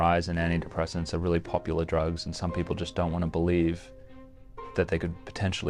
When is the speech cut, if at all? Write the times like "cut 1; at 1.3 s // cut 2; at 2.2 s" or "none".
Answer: none